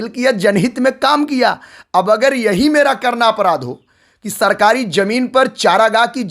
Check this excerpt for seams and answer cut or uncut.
uncut